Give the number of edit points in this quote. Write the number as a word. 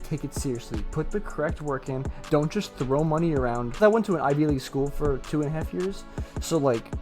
one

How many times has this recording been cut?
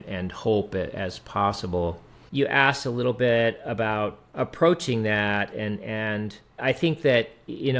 one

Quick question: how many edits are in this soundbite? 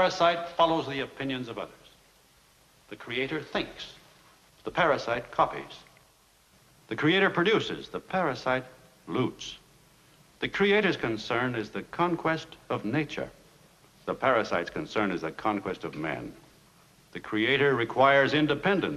one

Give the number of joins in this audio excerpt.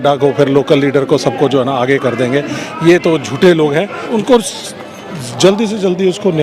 one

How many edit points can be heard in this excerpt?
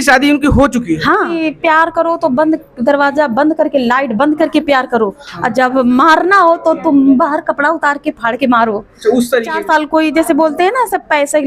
two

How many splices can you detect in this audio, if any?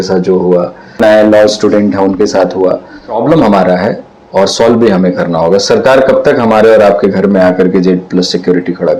two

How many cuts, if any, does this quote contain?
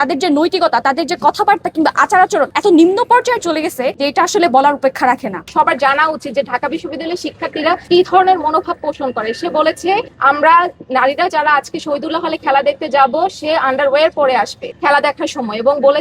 four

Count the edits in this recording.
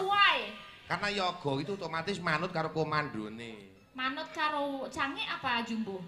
zero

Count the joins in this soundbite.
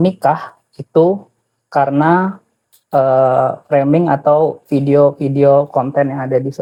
zero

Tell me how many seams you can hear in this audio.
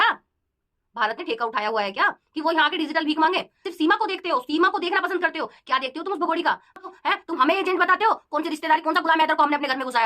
two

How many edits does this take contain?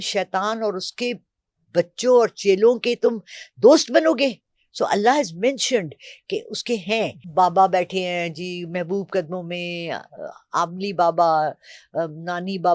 one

